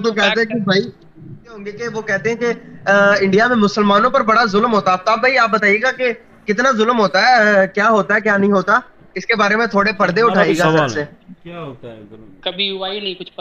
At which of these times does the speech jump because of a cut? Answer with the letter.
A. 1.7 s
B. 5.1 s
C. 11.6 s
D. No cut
A